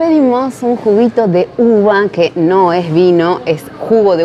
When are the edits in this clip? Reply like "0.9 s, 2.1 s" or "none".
none